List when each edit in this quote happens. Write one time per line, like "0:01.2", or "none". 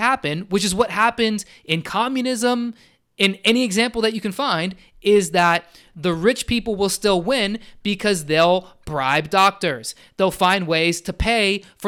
none